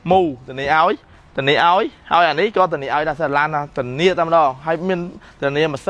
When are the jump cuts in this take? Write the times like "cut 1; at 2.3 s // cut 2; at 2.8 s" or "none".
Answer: none